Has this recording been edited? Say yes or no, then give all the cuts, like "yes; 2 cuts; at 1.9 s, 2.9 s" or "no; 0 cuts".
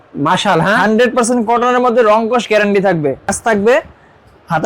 yes; 1 cut; at 3.3 s